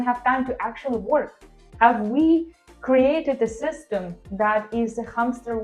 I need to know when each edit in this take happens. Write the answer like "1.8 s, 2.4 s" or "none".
1.6 s